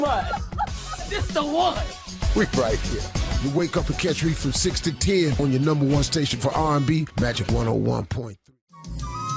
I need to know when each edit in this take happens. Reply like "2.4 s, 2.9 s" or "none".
8.3 s